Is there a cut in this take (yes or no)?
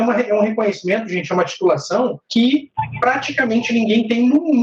yes